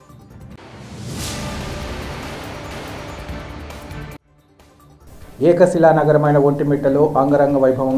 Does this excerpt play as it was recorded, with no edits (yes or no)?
no